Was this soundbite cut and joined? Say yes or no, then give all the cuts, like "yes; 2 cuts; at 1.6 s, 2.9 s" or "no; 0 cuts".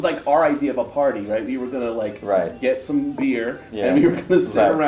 no; 0 cuts